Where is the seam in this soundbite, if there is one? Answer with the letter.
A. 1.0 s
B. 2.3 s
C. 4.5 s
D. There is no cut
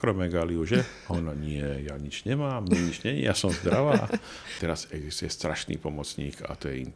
C